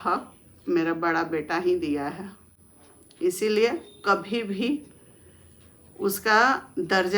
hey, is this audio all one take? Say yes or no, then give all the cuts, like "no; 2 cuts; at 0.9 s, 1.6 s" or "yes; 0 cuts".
yes; 0 cuts